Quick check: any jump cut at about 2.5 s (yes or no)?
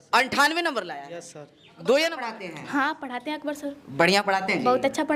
yes